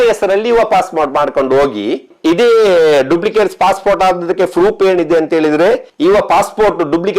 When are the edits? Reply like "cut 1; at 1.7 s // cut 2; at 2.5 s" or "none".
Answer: cut 1; at 2.1 s // cut 2; at 5.9 s